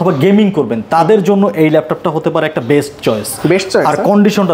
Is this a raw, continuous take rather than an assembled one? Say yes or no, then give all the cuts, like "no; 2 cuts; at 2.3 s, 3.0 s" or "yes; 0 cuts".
yes; 0 cuts